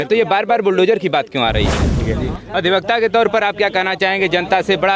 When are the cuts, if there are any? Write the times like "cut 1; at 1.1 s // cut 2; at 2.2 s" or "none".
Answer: cut 1; at 2.0 s

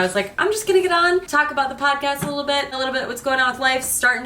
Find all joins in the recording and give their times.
cut 1; at 1.3 s // cut 2; at 2.8 s

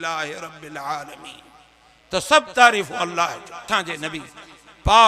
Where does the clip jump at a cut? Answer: cut 1; at 3.7 s

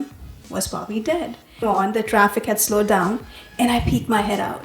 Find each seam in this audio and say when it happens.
cut 1; at 1.6 s

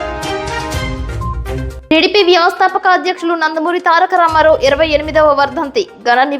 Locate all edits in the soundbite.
none

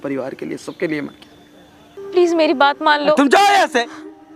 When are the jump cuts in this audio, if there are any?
cut 1; at 1.9 s

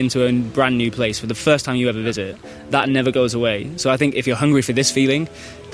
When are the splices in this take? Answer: cut 1; at 1.4 s // cut 2; at 4.2 s

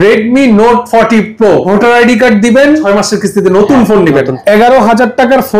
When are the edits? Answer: cut 1; at 1.7 s // cut 2; at 2.8 s // cut 3; at 4.3 s

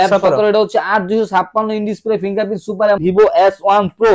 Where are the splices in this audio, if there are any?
cut 1; at 3.0 s

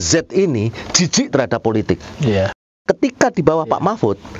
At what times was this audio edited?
cut 1; at 2.8 s

